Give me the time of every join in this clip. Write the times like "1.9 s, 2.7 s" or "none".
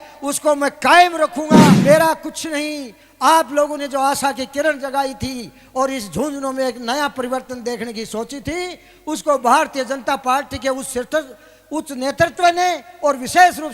1.8 s

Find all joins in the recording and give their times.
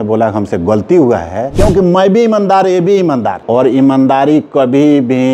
1.5 s, 3.4 s

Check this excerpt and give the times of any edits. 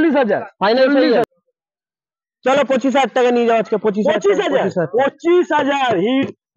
1.2 s

